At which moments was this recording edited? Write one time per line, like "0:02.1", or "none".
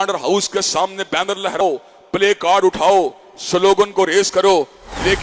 0:01.6